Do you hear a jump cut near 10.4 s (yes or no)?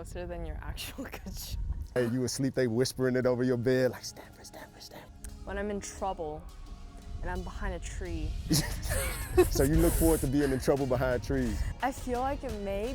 no